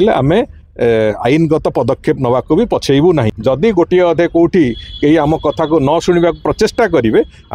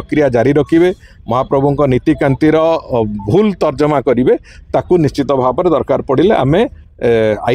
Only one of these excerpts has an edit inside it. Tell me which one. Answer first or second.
first